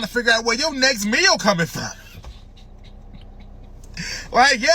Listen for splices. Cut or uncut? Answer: uncut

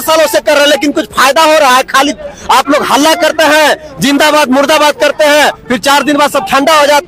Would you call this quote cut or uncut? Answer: uncut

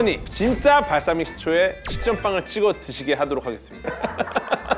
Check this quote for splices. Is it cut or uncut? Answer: uncut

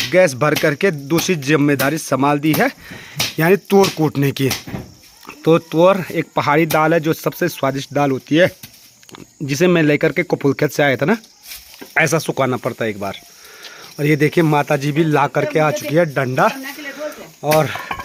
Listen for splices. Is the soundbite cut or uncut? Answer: uncut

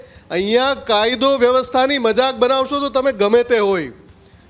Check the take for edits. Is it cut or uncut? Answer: uncut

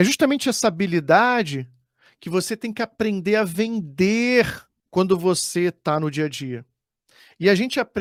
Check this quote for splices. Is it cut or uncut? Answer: uncut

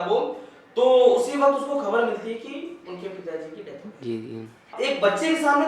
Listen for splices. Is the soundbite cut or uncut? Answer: cut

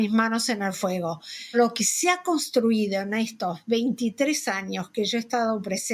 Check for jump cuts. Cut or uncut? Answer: cut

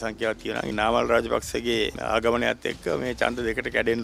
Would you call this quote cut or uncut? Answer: cut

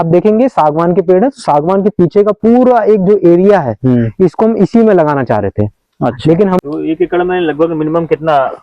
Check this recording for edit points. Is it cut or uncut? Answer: cut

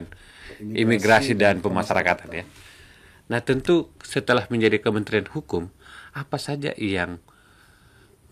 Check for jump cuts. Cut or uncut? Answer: uncut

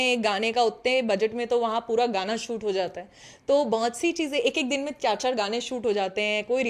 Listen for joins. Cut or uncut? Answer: uncut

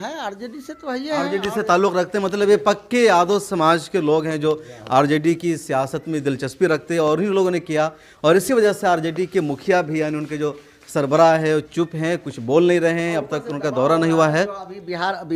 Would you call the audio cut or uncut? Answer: uncut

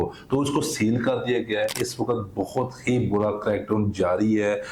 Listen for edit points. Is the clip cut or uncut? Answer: cut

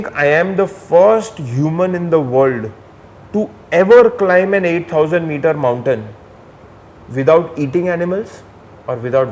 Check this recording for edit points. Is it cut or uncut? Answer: uncut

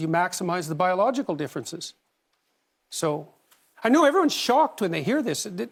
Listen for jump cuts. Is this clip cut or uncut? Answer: uncut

